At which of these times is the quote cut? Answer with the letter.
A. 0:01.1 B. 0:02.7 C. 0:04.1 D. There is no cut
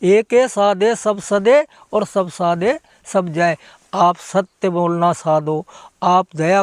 D